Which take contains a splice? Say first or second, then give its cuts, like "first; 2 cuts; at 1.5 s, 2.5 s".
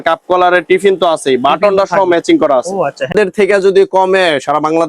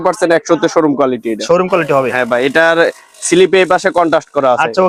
first; 1 cut; at 3.1 s